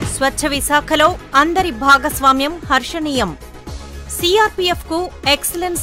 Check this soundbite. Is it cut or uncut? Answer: uncut